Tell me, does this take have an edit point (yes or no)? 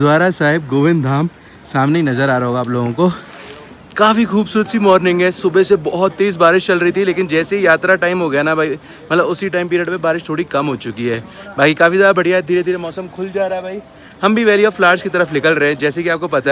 no